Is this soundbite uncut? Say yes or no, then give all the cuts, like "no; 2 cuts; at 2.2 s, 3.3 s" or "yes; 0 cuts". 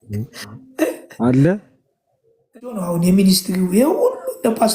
no; 1 cut; at 2.9 s